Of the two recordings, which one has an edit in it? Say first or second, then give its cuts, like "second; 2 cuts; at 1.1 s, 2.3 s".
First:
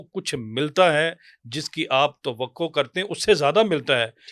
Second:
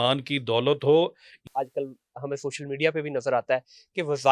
second; 1 cut; at 1.4 s